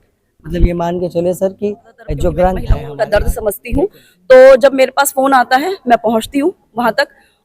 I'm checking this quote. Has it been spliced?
yes; 1 cut; at 2.8 s

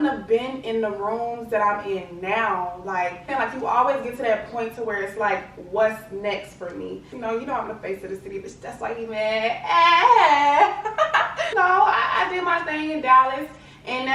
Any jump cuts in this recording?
yes; 3 cuts; at 3.3 s, 7.2 s, 11.5 s

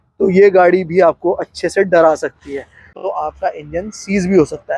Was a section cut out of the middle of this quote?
yes; 1 cut; at 3.0 s

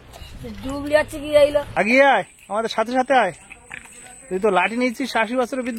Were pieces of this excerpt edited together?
yes; 1 cut; at 1.7 s

